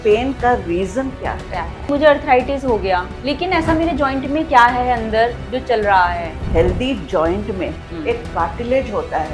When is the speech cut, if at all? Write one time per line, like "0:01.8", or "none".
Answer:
0:01.9
0:03.1
0:06.4